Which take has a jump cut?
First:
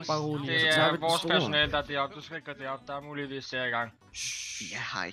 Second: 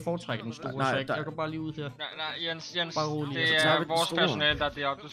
first; 1 cut; at 4.1 s

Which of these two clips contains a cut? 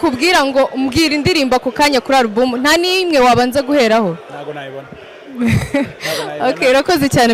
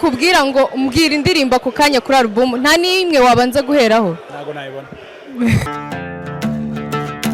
second; 1 cut; at 5.6 s

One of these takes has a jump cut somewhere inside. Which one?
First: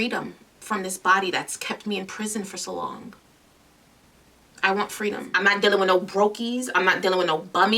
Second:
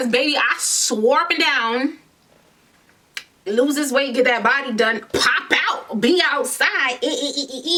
first; 1 cut; at 5.3 s

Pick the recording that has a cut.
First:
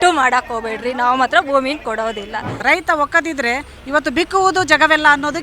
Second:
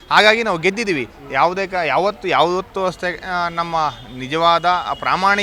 first; 1 cut; at 2.5 s

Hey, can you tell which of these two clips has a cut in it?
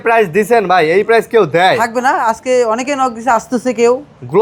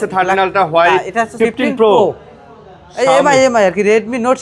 second; 1 cut; at 1.4 s

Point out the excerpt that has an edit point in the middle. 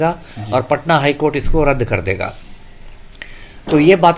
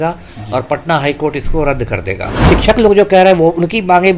second; 1 cut; at 2.4 s

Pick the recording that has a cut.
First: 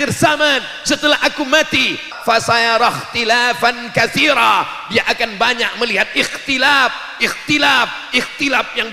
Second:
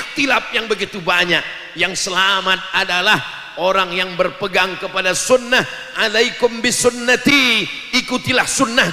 first; 1 cut; at 2.1 s

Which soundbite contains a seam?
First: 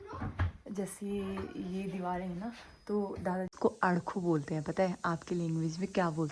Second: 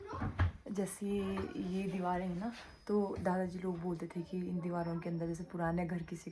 first; 1 cut; at 3.5 s

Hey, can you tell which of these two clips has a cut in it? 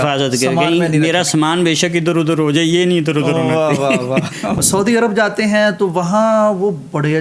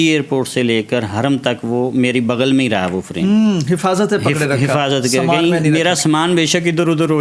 first; 1 cut; at 4.6 s

